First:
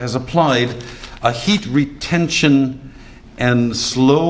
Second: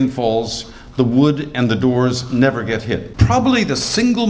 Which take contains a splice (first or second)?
second